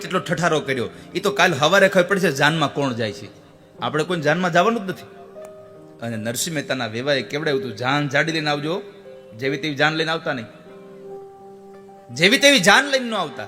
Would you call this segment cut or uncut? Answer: cut